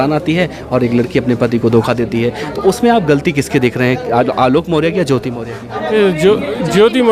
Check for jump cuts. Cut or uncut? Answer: uncut